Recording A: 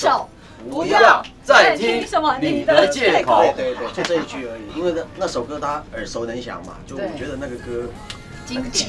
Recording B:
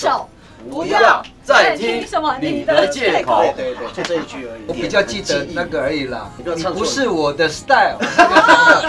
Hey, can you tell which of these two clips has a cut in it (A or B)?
B